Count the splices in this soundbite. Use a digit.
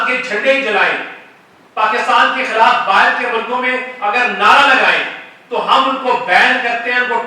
0